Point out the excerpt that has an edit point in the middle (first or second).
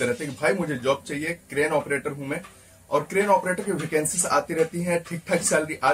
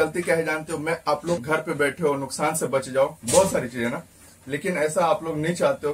second